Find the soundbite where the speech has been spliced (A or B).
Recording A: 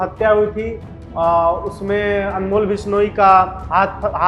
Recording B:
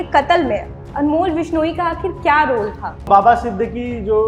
B